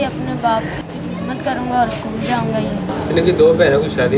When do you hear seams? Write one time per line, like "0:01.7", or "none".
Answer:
0:02.9